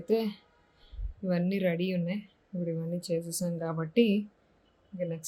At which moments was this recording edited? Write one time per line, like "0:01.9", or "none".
none

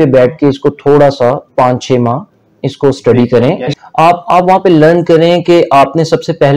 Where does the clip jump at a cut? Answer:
0:03.7

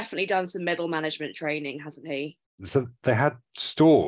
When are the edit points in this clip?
0:02.5

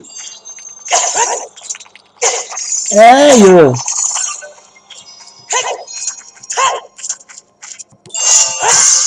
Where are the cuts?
0:07.4

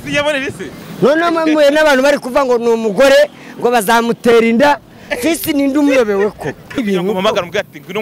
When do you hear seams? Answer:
0:06.8

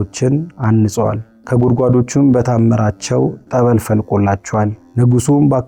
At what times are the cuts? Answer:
0:01.3
0:04.8

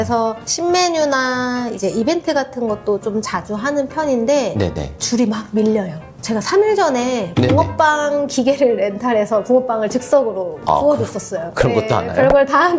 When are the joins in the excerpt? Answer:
0:05.0

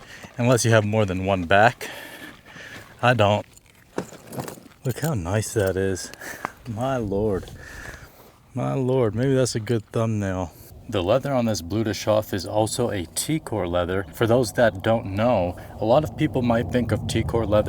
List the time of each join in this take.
0:03.5
0:04.7
0:10.8

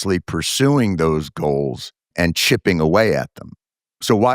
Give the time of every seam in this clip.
0:02.1

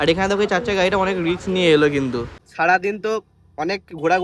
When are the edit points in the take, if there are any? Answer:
0:02.4

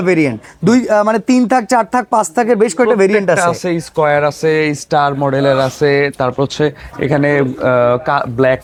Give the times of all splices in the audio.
none

